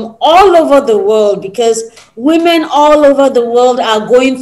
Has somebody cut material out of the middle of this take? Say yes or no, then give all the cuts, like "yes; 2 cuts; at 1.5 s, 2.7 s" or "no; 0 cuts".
no; 0 cuts